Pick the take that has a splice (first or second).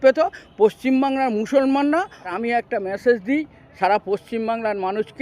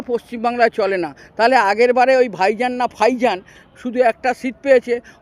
first